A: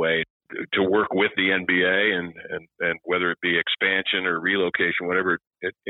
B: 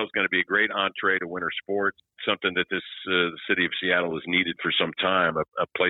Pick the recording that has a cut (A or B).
B